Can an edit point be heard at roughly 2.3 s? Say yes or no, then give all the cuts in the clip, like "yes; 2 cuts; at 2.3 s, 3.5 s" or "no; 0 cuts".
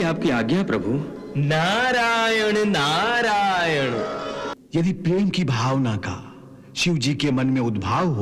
no; 1 cut; at 4.5 s